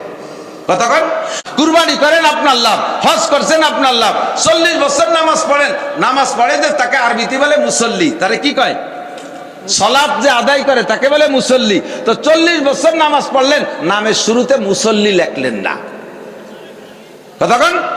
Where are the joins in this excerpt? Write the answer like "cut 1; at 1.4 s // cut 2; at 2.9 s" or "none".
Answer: cut 1; at 1.4 s